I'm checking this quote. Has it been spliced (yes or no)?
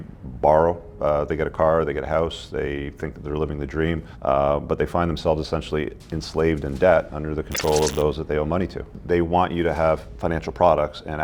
yes